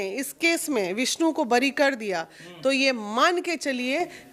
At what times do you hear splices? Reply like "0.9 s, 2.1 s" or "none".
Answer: none